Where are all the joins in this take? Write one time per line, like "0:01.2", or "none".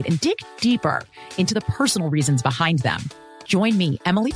none